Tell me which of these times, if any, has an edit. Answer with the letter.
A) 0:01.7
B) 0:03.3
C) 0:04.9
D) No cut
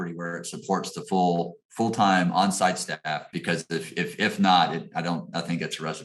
B